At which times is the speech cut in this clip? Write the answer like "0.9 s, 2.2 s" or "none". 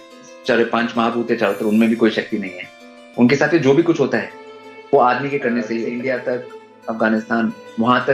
5.9 s